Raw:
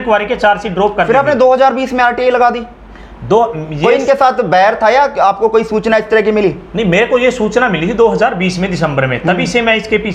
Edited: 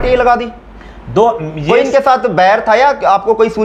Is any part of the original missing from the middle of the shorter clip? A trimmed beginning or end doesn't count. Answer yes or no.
no